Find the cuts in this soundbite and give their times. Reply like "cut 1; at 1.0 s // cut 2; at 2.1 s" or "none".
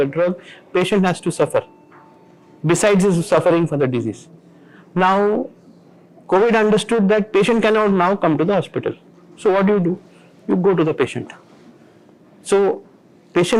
none

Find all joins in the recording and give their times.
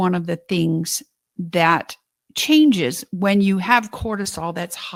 none

